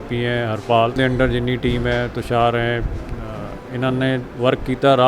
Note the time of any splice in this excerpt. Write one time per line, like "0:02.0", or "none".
0:01.0